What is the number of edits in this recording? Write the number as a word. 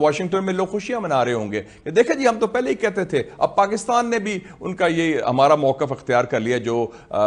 zero